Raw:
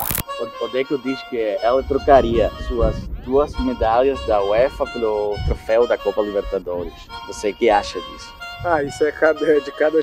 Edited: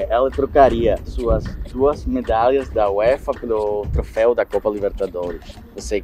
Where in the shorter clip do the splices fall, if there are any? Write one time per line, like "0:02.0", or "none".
none